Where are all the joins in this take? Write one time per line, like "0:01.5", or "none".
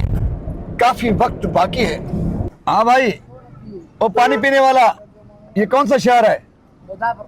0:02.5